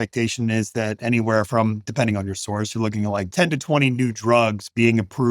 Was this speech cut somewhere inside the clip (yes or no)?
yes